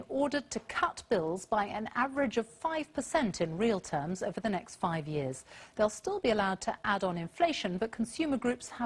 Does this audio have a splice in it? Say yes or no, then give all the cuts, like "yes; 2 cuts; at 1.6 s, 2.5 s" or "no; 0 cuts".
no; 0 cuts